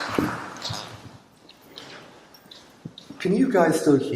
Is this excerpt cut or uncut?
cut